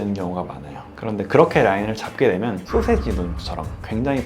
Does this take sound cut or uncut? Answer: cut